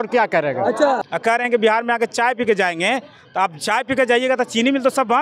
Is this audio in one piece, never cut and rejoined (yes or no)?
no